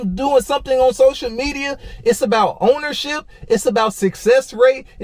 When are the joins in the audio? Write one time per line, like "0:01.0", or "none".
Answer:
none